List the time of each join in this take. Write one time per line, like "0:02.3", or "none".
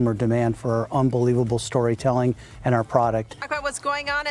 0:03.3